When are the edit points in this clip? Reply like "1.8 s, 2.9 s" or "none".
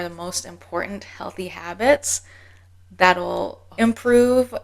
3.6 s